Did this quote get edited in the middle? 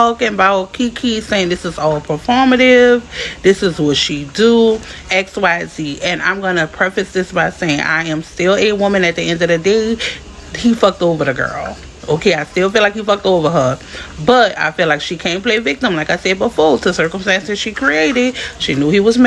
no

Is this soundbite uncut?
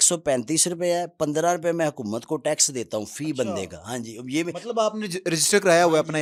yes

